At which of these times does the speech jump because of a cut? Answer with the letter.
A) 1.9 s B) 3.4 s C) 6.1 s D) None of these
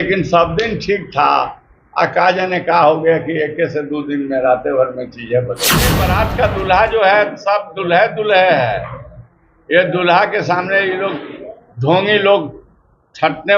C